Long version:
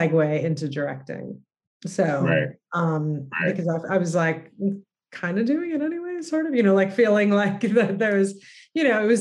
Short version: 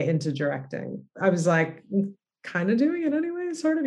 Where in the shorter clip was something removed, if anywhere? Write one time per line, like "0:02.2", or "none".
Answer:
0:01.2